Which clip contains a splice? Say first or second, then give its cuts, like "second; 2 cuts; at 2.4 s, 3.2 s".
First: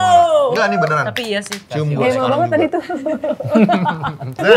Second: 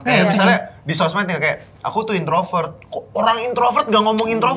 first; 1 cut; at 1.6 s